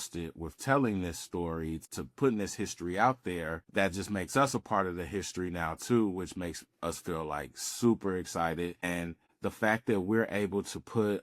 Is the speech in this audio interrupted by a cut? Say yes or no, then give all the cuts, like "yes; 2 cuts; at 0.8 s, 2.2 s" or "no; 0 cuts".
yes; 3 cuts; at 1.9 s, 3.6 s, 8.8 s